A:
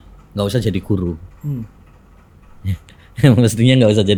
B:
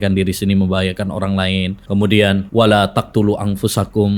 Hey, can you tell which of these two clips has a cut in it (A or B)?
B